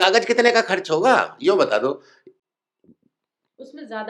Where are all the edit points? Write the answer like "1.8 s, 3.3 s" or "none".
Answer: none